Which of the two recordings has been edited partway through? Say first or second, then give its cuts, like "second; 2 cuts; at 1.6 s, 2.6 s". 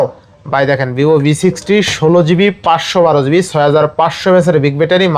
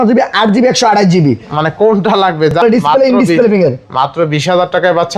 second; 1 cut; at 2.6 s